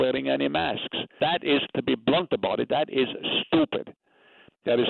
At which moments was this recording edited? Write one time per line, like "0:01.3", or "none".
0:01.2